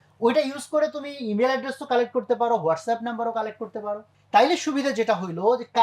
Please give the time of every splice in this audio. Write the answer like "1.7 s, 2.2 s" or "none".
4.1 s